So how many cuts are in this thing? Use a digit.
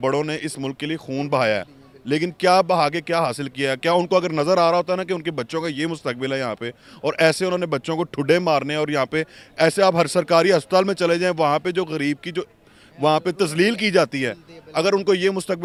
0